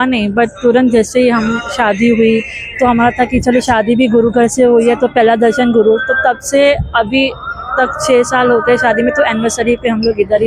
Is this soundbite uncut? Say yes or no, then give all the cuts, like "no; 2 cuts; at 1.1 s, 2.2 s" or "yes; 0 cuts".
yes; 0 cuts